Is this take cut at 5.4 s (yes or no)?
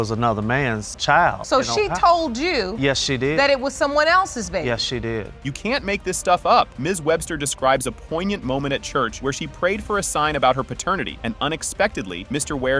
no